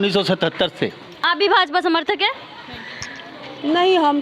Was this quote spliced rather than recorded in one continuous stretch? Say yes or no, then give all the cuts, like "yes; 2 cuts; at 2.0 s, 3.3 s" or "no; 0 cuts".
yes; 1 cut; at 1.1 s